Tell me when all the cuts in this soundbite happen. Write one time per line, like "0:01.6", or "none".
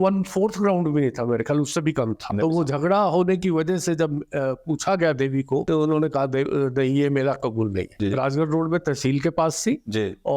0:02.3
0:05.7
0:07.9